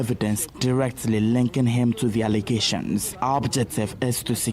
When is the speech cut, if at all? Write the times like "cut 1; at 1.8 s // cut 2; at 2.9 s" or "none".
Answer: cut 1; at 3.1 s